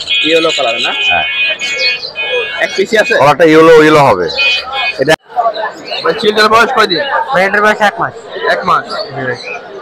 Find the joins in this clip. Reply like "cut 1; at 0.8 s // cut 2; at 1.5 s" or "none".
cut 1; at 5.1 s